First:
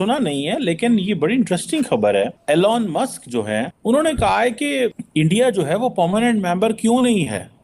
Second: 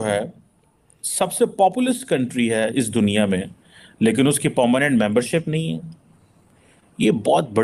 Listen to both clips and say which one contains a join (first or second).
first